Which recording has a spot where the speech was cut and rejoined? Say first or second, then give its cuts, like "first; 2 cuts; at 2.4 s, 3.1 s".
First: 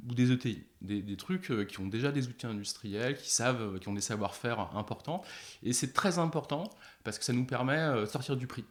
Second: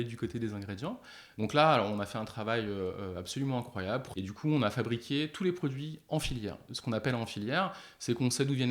second; 2 cuts; at 4.1 s, 6.7 s